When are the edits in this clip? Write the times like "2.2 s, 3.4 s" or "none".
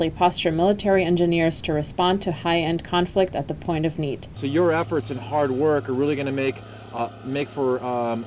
none

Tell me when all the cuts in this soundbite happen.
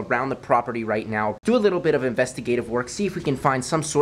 1.4 s

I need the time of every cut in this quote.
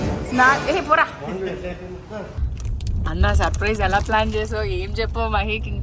2.5 s

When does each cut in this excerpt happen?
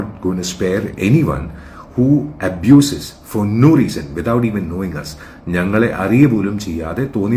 none

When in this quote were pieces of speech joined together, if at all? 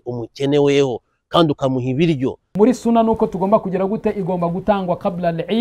2.5 s

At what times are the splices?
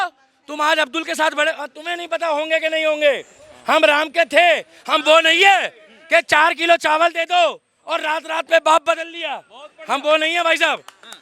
none

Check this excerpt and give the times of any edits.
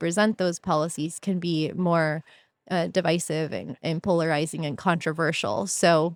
none

